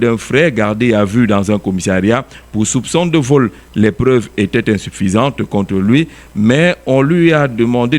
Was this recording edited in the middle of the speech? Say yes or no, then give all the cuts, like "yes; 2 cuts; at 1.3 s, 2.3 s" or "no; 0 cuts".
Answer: no; 0 cuts